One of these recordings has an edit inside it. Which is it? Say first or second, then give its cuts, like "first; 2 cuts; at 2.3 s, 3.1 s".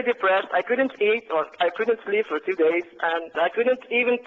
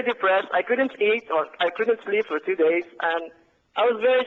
first; 1 cut; at 3.4 s